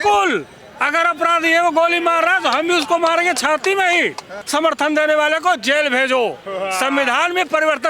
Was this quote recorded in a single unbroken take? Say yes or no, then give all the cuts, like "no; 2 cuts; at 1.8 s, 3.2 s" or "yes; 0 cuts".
no; 1 cut; at 4.4 s